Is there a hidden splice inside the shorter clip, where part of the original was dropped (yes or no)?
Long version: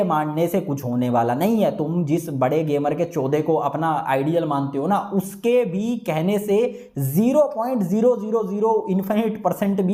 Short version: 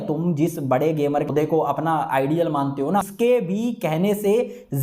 yes